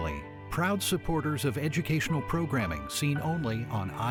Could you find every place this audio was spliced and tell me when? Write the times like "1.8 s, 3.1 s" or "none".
none